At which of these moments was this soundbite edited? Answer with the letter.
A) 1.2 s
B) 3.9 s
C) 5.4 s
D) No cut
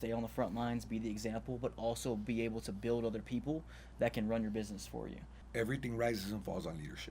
C